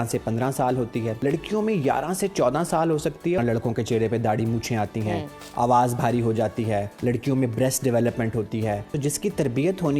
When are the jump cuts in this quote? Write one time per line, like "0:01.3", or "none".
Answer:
0:01.2
0:03.4
0:06.9
0:08.9